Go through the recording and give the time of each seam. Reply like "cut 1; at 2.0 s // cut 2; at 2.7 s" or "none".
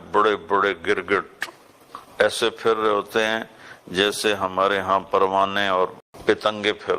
cut 1; at 6.1 s